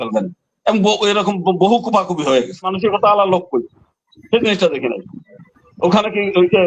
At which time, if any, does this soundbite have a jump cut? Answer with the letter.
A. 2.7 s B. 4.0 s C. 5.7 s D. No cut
A